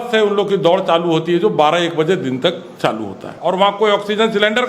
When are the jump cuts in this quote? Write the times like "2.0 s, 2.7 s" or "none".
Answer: 3.3 s